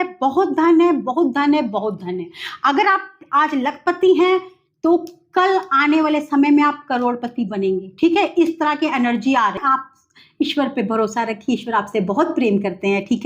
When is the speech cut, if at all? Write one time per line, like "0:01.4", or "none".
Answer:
0:09.6